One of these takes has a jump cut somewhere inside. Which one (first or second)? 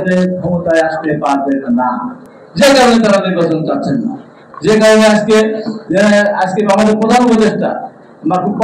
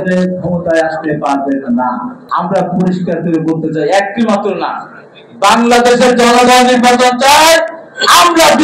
second